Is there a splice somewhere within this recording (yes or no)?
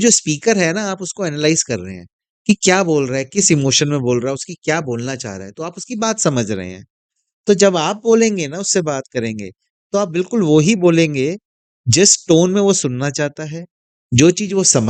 no